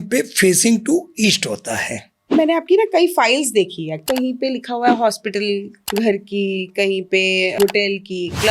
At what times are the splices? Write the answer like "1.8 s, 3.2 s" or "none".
2.3 s, 4.0 s, 5.8 s, 7.5 s